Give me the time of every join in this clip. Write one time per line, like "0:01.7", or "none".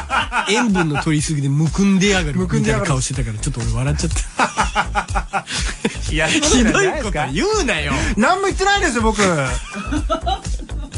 none